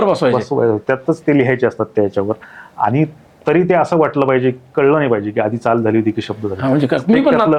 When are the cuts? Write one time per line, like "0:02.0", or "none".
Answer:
none